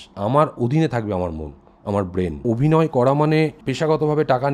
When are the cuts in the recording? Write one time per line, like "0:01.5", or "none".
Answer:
0:02.4
0:03.6